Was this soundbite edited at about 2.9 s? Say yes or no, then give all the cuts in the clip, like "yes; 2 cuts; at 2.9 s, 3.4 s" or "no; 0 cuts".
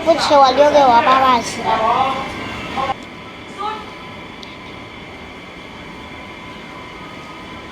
yes; 1 cut; at 2.9 s